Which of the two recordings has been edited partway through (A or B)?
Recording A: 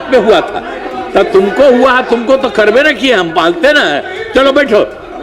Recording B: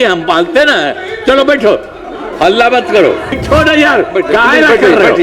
B